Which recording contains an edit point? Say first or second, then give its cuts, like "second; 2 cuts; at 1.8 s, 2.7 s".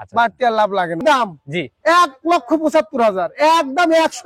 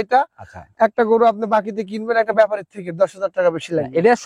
first; 1 cut; at 1.0 s